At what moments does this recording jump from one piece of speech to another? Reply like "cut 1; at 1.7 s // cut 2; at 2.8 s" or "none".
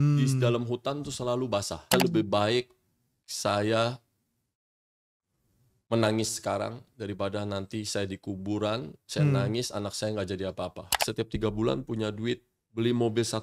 cut 1; at 1.9 s // cut 2; at 11.0 s

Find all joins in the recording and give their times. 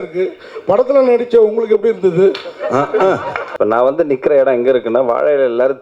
cut 1; at 3.4 s

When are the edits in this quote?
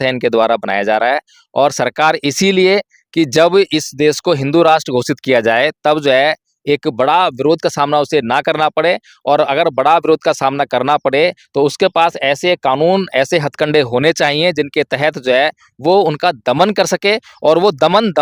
none

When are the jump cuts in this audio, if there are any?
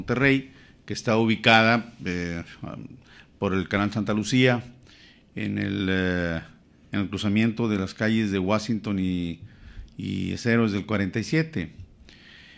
cut 1; at 6.5 s

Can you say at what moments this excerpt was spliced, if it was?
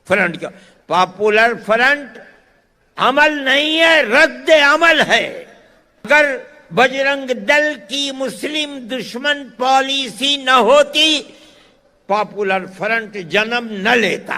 cut 1; at 6.1 s

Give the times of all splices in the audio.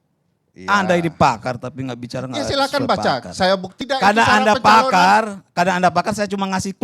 cut 1; at 3.8 s

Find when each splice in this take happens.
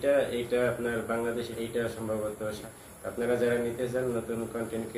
cut 1; at 1.5 s // cut 2; at 2.6 s

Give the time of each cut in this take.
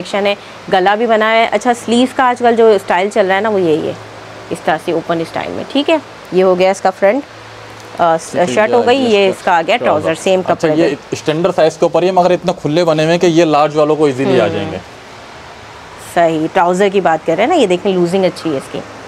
none

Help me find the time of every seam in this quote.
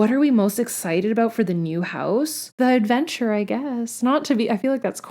none

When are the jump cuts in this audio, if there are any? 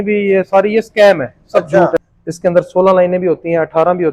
cut 1; at 2.0 s

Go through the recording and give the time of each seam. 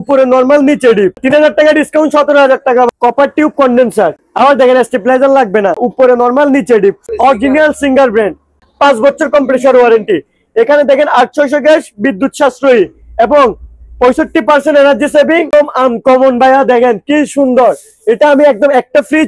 cut 1; at 1.2 s // cut 2; at 2.9 s // cut 3; at 5.9 s // cut 4; at 7.0 s // cut 5; at 8.6 s // cut 6; at 15.5 s

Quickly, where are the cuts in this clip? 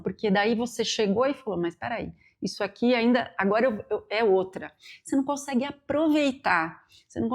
none

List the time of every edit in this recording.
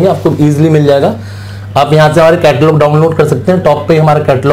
none

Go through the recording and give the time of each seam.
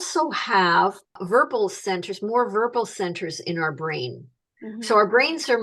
cut 1; at 1.2 s

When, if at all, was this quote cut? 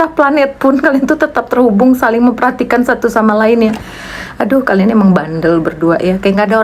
none

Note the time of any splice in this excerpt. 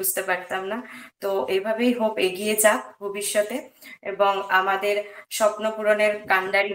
none

